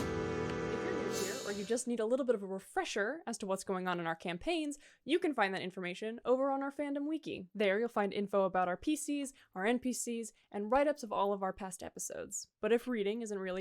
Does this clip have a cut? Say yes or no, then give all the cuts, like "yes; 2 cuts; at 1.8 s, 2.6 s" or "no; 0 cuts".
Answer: yes; 1 cut; at 1.1 s